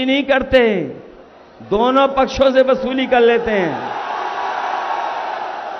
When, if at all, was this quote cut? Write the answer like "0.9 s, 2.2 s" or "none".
none